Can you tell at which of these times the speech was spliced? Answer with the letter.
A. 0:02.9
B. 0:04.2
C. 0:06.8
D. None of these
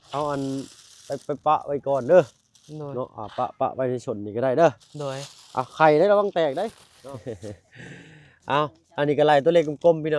C